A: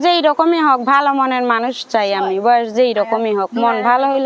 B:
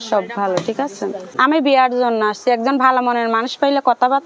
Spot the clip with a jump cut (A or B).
B